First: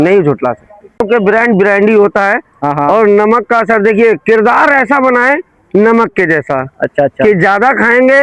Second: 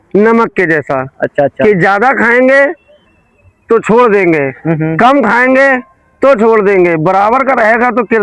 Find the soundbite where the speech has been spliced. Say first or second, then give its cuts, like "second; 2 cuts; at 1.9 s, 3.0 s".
first; 1 cut; at 1.0 s